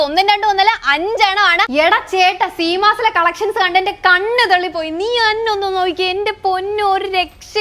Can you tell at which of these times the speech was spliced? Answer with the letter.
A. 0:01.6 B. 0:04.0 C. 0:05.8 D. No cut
A